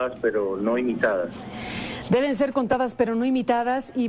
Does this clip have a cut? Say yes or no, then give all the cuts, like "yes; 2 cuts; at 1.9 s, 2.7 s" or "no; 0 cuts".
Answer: yes; 1 cut; at 1.0 s